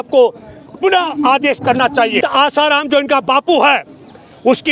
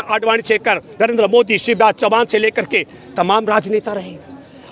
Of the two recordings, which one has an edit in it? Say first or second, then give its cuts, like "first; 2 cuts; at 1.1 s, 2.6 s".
first; 1 cut; at 2.2 s